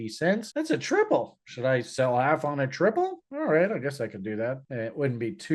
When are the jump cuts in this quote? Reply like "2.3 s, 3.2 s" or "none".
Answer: none